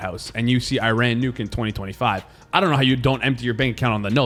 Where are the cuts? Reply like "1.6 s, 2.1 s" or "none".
none